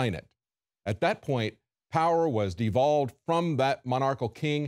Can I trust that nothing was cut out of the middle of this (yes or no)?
no